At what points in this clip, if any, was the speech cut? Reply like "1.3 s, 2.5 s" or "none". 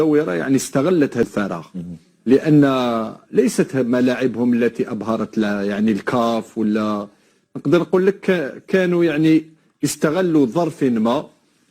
1.3 s